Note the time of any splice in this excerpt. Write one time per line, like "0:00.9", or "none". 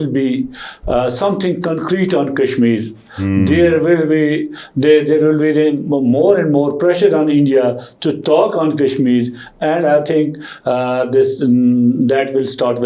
none